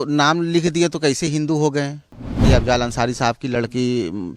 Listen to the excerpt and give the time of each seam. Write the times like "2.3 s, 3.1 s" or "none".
2.4 s